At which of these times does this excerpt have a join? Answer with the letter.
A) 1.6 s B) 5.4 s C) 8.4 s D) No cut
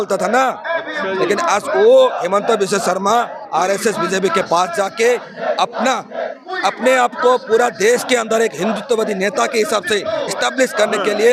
D